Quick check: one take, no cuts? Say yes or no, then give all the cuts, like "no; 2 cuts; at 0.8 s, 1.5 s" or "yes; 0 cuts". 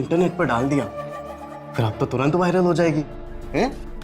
yes; 0 cuts